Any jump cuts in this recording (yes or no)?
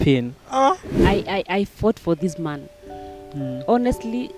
yes